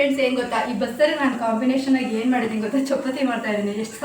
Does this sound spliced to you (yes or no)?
no